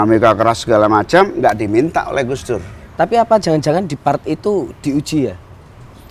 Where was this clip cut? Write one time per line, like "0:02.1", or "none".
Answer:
0:02.8